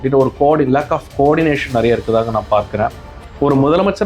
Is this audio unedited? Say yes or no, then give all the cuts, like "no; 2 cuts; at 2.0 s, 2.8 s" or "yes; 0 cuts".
no; 1 cut; at 3.1 s